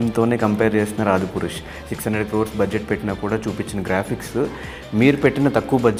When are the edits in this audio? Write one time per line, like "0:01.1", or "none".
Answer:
none